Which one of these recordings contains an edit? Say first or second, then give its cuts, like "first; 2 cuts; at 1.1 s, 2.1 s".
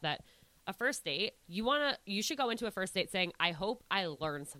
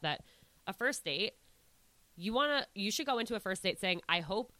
first; 1 cut; at 1.4 s